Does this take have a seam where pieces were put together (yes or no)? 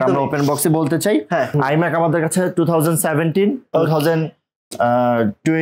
yes